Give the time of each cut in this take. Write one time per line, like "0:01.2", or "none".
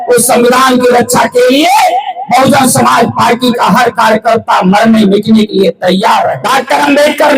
0:06.4